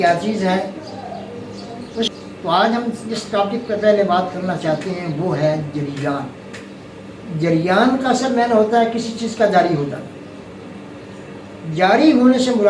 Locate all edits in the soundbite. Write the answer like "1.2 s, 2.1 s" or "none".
2.1 s